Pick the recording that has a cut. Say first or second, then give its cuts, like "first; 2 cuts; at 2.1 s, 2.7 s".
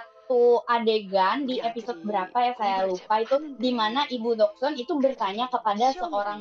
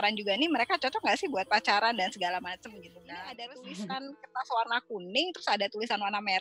second; 1 cut; at 2.9 s